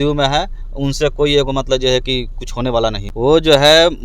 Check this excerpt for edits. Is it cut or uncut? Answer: cut